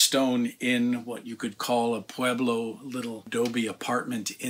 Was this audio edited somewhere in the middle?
yes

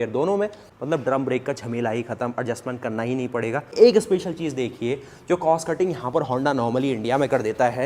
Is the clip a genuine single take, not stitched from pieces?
no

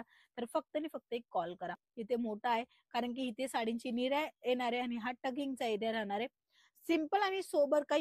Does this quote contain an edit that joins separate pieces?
yes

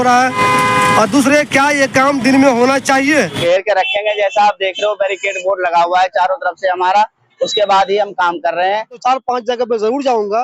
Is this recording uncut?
no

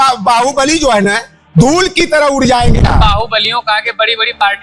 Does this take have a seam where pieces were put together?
yes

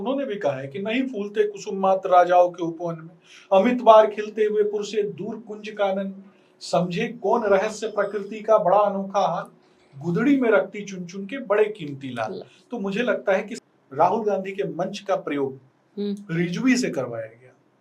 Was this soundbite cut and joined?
yes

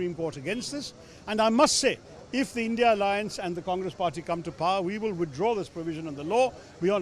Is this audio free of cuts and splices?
yes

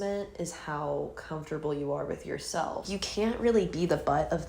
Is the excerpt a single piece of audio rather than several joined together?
no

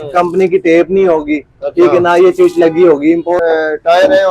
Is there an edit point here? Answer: yes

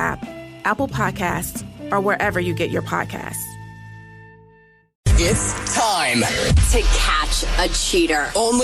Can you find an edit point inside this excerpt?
yes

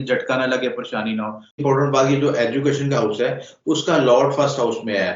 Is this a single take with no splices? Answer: no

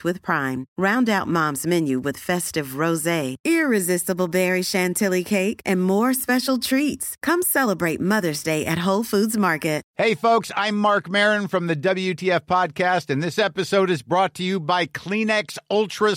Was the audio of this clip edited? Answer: yes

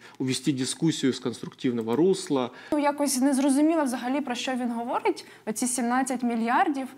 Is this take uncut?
no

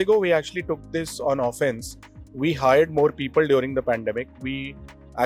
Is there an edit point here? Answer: no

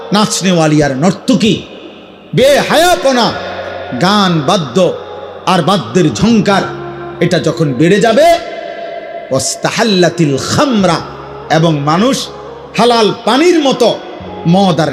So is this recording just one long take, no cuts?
yes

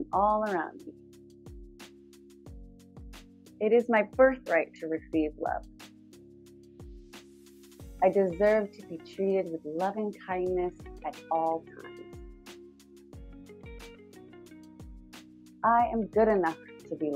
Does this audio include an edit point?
yes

